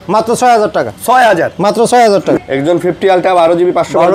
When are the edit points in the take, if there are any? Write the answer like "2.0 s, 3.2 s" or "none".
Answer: 2.4 s